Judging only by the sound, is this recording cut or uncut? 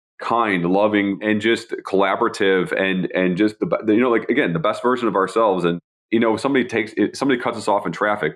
cut